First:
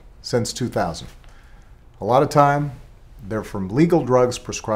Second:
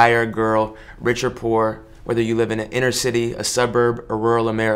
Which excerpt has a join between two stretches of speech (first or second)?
second